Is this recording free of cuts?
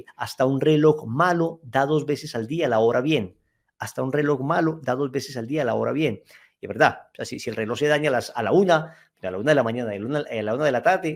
yes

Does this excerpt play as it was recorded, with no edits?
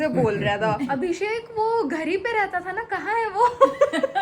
no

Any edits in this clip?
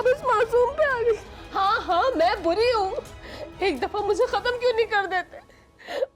yes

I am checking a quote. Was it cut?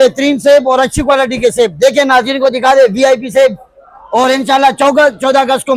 no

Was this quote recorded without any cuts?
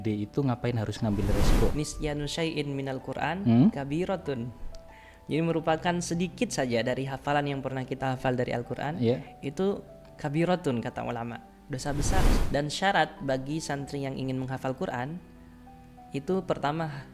no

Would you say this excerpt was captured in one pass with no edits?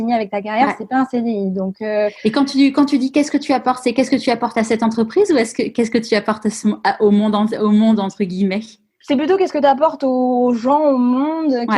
yes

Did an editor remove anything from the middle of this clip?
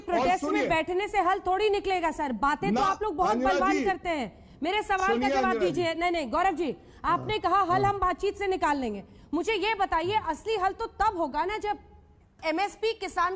no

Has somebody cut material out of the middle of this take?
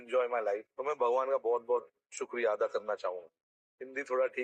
no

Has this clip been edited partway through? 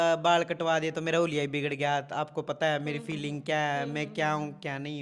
no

